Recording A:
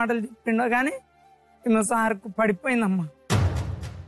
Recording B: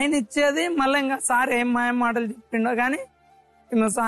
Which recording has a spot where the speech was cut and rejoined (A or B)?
A